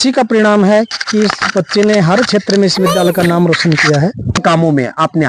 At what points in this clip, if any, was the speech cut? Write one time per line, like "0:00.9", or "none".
0:04.4